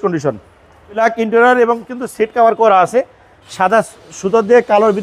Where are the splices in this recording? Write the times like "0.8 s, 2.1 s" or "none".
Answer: 1.0 s